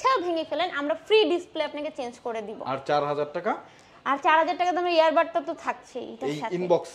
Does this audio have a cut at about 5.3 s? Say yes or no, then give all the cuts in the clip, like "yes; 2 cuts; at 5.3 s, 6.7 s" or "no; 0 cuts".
no; 0 cuts